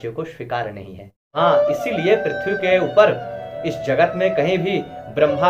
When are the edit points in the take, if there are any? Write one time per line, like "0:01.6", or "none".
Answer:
0:01.4